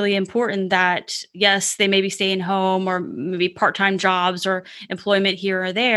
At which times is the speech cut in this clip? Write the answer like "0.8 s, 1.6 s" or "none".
none

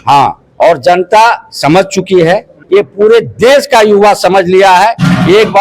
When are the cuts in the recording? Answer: 2.6 s

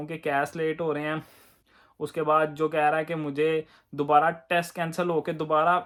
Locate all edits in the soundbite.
none

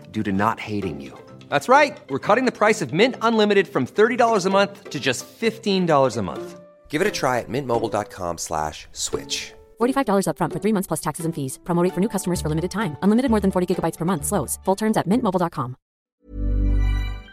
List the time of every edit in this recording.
16.2 s

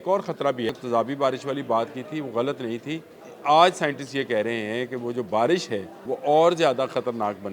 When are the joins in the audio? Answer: 0.7 s, 3.2 s, 5.9 s

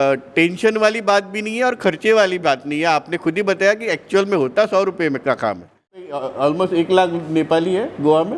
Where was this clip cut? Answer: 6.2 s

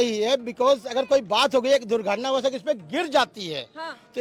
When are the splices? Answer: none

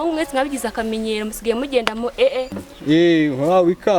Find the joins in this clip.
2.6 s

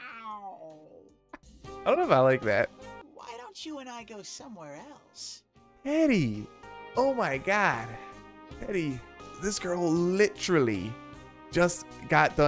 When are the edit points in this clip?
3.1 s

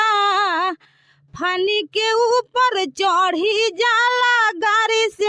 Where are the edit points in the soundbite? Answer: none

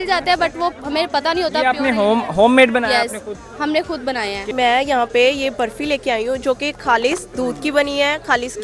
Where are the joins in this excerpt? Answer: 4.4 s

